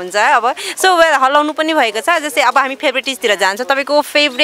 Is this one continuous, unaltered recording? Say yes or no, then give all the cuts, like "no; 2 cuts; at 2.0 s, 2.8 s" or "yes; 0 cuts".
yes; 0 cuts